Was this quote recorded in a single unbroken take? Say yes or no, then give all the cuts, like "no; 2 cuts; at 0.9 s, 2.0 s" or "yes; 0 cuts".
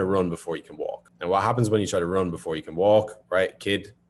yes; 0 cuts